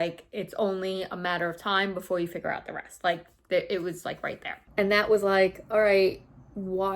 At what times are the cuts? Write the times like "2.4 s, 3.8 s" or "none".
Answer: 4.5 s